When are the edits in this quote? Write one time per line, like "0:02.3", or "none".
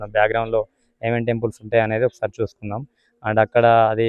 none